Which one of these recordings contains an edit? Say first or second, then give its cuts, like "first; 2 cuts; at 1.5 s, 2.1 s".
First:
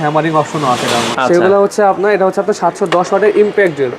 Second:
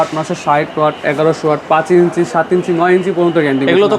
first; 1 cut; at 1.1 s